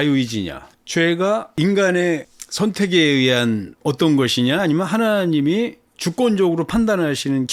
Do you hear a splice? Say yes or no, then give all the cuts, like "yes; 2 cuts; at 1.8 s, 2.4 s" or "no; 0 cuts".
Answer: no; 0 cuts